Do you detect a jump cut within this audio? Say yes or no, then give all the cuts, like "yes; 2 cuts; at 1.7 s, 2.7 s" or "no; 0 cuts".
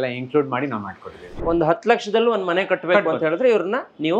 yes; 1 cut; at 1.3 s